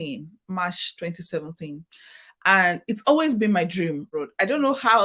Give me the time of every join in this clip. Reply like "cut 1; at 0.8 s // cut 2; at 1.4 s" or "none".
cut 1; at 4.1 s